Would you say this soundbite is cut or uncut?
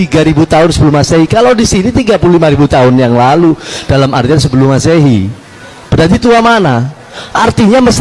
uncut